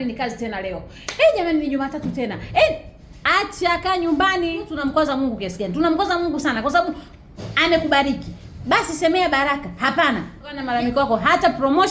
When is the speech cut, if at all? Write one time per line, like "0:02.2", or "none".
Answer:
0:04.7
0:10.6